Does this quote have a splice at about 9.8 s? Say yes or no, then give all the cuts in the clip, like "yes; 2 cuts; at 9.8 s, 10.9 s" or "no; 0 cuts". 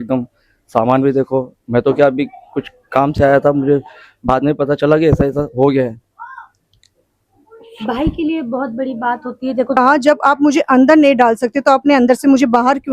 yes; 1 cut; at 9.8 s